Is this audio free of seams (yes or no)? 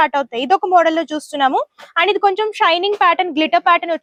yes